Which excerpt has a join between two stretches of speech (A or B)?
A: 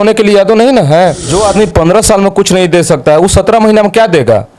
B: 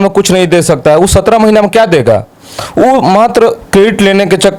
A